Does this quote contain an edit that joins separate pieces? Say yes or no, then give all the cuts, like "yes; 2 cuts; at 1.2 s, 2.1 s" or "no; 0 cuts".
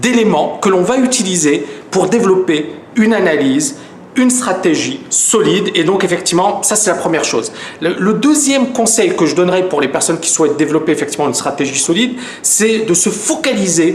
yes; 1 cut; at 8.2 s